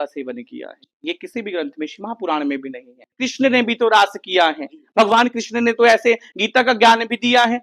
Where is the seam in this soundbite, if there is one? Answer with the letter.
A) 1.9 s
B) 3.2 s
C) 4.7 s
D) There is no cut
B